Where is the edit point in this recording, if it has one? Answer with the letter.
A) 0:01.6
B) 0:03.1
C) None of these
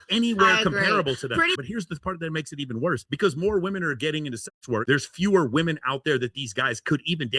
A